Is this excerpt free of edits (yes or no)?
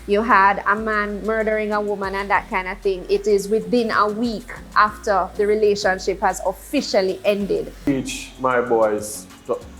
no